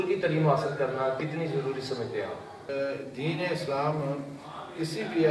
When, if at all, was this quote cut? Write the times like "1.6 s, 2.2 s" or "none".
2.6 s